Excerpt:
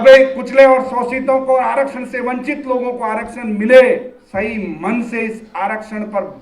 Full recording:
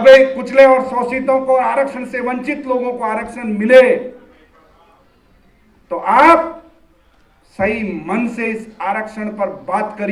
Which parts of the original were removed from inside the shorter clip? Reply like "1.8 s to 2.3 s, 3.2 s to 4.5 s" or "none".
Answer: 4.2 s to 7.4 s